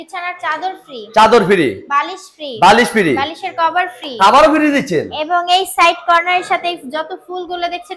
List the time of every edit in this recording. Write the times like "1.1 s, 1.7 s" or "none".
none